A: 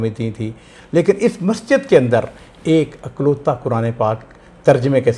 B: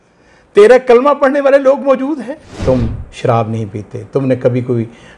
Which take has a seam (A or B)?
B